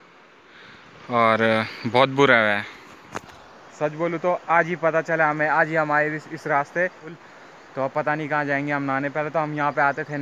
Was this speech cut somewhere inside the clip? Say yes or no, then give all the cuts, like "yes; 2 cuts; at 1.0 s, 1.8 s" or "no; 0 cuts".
yes; 1 cut; at 7.2 s